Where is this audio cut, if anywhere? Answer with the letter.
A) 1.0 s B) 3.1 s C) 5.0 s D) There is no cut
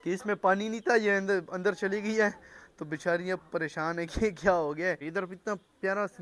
C